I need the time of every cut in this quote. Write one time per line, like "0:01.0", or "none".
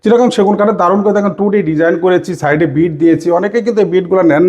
none